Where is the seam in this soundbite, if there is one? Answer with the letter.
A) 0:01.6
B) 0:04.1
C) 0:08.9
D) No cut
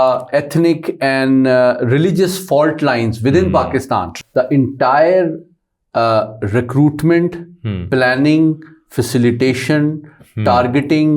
B